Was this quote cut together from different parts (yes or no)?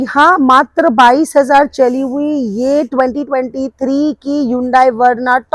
no